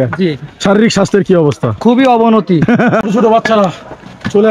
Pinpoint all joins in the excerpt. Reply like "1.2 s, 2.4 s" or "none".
3.0 s